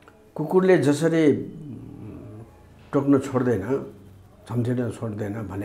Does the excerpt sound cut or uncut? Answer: uncut